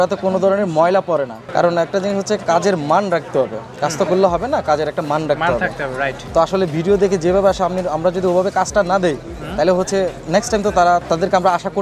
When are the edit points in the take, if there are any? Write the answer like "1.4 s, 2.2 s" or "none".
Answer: 1.4 s, 6.2 s